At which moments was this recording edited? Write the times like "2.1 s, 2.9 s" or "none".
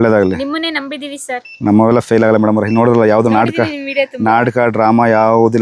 none